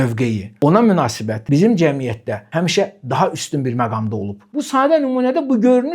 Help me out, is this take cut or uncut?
cut